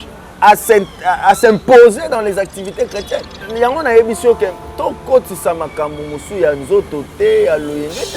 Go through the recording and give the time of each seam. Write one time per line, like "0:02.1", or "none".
0:03.4